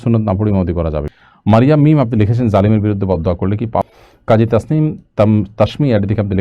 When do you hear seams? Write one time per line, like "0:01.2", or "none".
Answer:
0:01.2
0:03.8